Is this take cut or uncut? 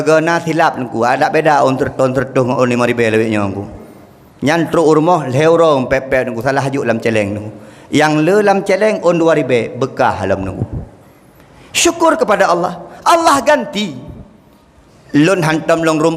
uncut